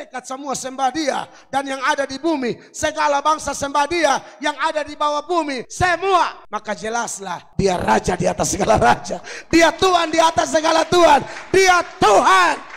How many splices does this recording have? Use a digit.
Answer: 3